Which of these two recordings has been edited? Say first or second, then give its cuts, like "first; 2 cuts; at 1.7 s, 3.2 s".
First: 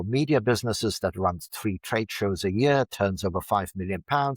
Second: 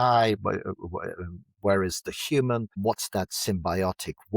second; 1 cut; at 2.7 s